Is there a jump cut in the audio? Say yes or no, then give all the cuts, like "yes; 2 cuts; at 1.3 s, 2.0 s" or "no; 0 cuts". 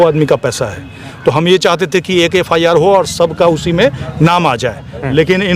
no; 0 cuts